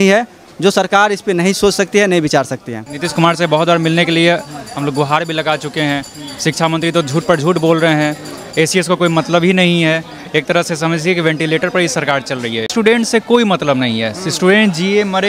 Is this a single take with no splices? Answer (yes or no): no